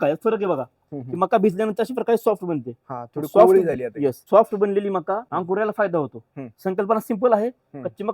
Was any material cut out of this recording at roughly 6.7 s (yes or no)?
no